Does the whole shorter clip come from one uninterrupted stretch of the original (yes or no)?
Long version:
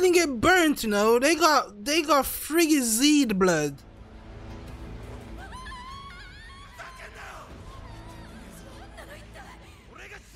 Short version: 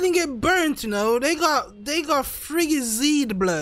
yes